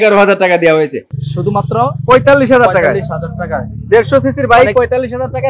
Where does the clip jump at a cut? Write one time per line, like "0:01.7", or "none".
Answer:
0:01.1